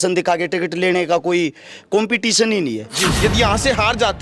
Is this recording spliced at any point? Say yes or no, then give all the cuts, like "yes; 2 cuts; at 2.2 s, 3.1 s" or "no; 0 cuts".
yes; 1 cut; at 3.0 s